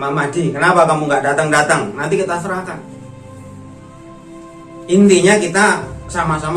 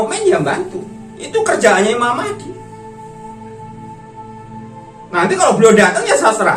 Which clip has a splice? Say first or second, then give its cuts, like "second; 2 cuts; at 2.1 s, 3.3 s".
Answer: second; 2 cuts; at 2.8 s, 4.9 s